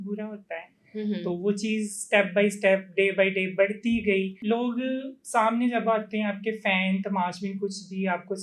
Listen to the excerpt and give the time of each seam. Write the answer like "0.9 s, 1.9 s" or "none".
4.4 s